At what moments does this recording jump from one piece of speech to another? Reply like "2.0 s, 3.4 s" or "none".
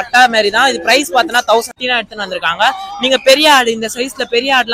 1.7 s